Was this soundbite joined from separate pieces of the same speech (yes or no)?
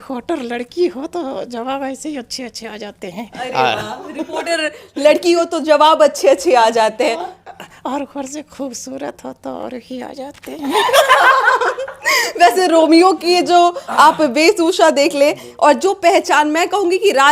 no